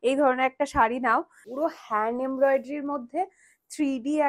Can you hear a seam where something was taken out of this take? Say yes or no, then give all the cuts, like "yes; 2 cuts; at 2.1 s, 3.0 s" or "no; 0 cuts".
yes; 1 cut; at 1.4 s